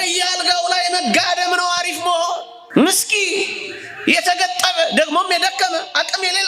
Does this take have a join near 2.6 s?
yes; 1 cut; at 2.6 s

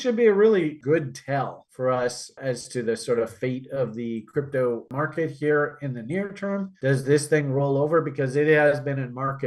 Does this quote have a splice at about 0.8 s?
yes; 3 cuts; at 0.8 s, 2.4 s, 4.9 s

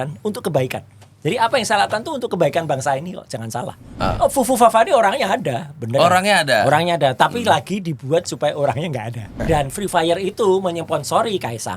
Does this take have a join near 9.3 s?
yes; 2 cuts; at 3.8 s, 9.3 s

